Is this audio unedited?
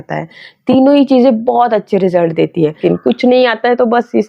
no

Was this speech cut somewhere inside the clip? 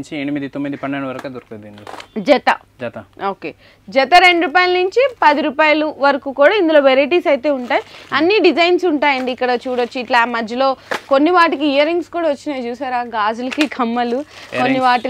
no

